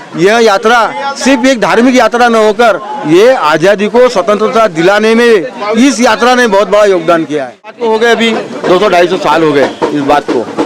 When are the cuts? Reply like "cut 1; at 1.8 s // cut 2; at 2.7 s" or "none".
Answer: cut 1; at 7.8 s